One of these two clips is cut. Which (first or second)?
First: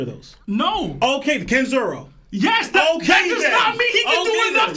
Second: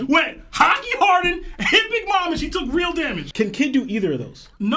second